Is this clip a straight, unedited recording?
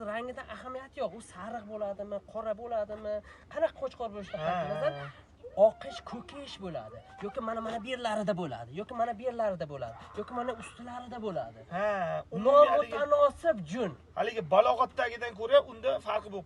yes; 0 cuts

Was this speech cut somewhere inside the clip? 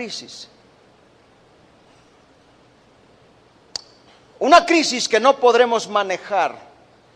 yes; 1 cut; at 5.8 s

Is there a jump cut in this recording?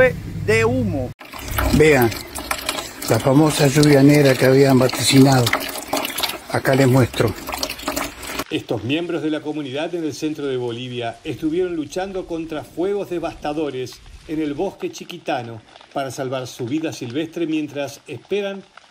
yes; 2 cuts; at 1.1 s, 8.4 s

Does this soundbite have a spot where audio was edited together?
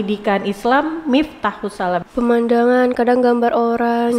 yes; 1 cut; at 2.1 s

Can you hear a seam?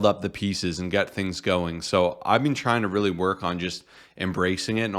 no; 0 cuts

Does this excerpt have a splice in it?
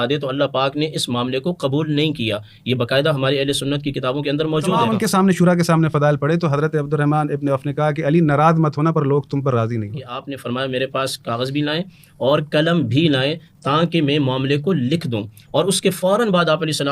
yes; 2 cuts; at 4.9 s, 10.3 s

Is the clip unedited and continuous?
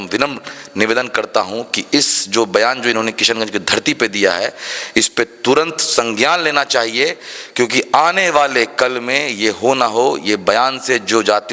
yes; 0 cuts

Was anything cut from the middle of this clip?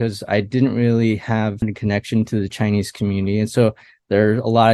no; 0 cuts

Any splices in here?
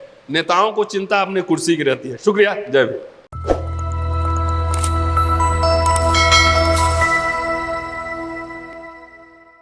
no; 0 cuts

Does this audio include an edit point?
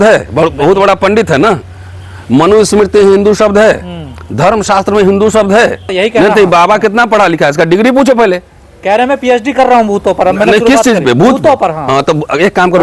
yes; 1 cut; at 5.9 s

